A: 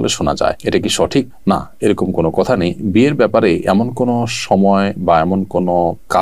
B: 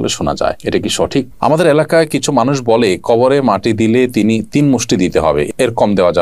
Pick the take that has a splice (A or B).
B